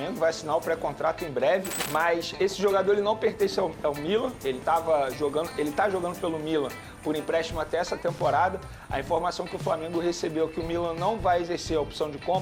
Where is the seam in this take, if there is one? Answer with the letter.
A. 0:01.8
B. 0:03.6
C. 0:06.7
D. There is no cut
A